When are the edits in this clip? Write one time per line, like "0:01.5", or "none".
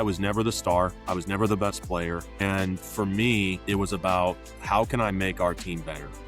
0:01.0
0:02.3
0:03.6